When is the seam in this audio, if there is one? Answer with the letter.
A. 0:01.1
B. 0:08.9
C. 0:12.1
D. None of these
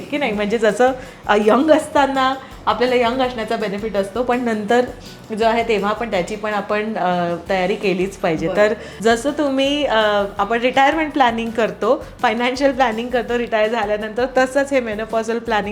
B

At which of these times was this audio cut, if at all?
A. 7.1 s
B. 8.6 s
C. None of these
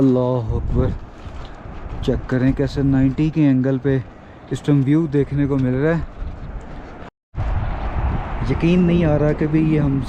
A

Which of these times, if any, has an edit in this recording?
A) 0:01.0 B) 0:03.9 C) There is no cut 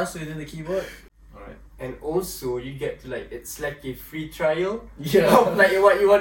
A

